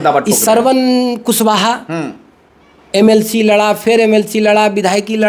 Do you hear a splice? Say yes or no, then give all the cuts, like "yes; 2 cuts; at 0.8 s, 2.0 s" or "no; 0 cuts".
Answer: no; 0 cuts